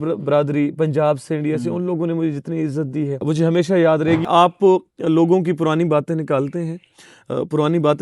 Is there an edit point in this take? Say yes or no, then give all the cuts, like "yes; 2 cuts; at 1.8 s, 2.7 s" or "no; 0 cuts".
yes; 2 cuts; at 3.2 s, 4.2 s